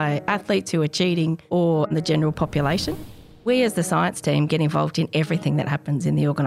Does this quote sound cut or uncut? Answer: cut